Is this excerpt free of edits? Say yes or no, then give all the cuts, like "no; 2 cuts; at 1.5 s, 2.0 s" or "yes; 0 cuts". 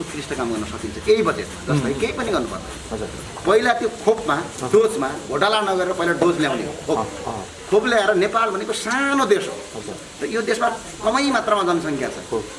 yes; 0 cuts